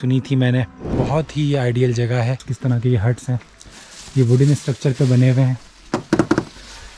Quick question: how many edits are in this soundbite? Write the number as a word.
two